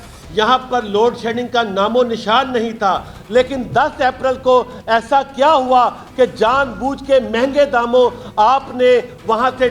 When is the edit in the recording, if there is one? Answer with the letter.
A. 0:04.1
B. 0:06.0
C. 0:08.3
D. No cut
D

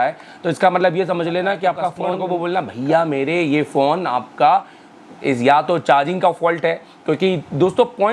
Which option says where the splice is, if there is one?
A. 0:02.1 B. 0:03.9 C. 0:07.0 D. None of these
A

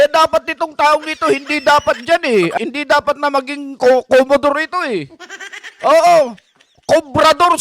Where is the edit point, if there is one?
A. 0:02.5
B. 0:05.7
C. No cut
A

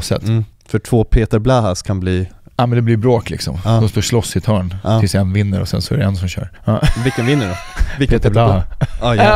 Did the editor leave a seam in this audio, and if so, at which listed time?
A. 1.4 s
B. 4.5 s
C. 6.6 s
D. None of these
C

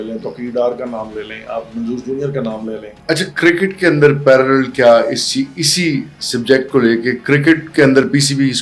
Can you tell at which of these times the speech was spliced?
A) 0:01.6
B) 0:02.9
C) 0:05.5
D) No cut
B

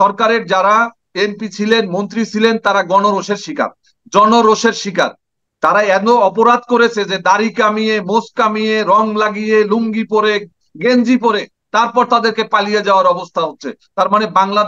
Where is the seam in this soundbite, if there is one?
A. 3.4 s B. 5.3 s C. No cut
B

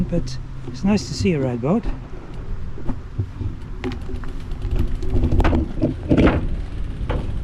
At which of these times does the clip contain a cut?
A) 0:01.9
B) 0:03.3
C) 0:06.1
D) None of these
D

